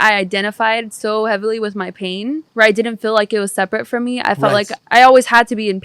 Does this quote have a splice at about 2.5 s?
yes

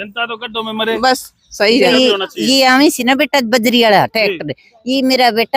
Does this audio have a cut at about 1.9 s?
yes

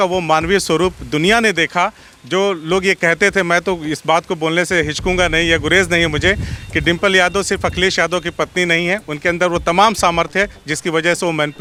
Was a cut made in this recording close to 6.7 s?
no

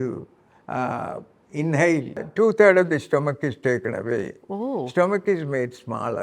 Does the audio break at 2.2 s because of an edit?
yes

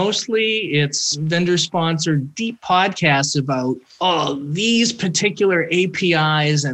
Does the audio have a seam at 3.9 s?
yes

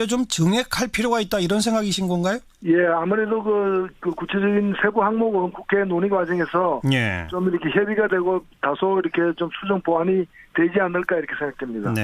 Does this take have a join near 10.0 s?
yes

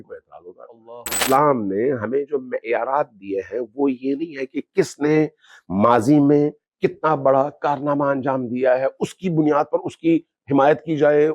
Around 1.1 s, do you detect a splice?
yes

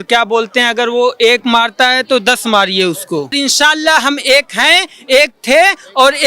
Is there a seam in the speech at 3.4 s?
yes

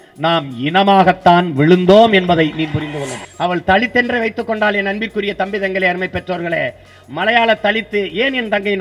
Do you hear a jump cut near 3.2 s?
yes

